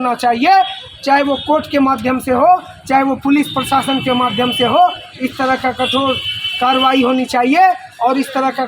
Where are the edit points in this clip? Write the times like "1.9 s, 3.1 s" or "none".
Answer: none